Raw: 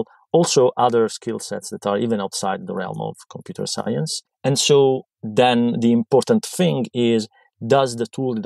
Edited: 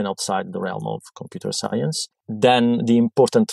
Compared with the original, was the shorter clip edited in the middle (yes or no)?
yes